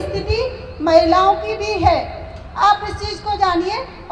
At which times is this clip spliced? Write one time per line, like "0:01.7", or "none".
none